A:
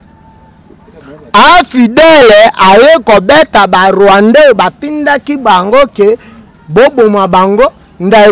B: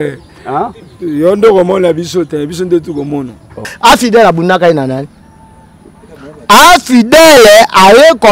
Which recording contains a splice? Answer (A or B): B